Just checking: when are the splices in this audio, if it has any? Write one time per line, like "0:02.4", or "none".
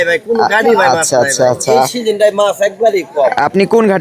none